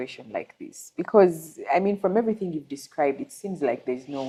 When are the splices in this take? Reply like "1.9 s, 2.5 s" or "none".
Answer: none